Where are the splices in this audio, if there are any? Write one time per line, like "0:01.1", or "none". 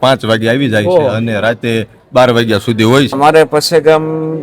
0:03.1